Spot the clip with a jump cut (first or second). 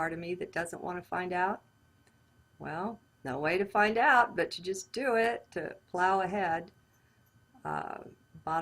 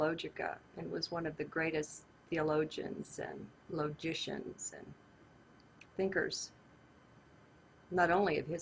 first